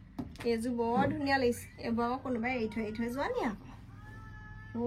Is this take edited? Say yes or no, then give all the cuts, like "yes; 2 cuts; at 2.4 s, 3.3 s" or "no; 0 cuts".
no; 0 cuts